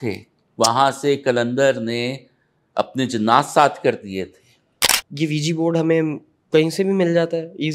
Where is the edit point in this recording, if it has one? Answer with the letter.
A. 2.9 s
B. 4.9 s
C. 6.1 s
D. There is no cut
B